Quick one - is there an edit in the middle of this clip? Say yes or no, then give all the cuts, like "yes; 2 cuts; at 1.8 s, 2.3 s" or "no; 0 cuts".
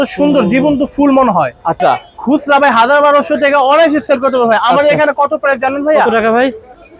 yes; 1 cut; at 2.1 s